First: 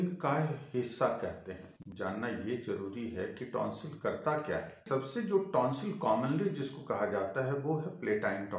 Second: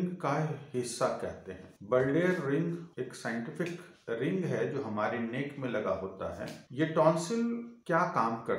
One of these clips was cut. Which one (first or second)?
first